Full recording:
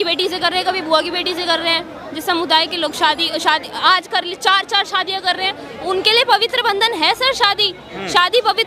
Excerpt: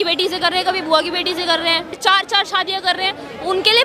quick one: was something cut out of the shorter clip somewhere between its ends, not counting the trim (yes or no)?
yes